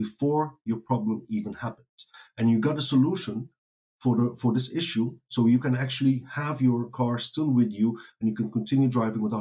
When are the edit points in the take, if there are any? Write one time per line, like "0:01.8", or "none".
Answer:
none